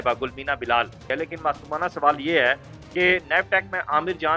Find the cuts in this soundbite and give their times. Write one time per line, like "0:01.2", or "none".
0:01.0